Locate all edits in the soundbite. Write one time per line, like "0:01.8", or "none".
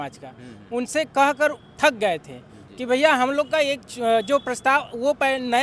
none